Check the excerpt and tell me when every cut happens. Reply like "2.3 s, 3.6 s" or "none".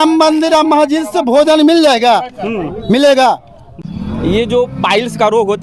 3.7 s